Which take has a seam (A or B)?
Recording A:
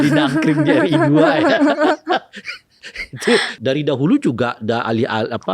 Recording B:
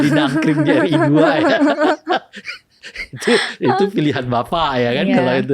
A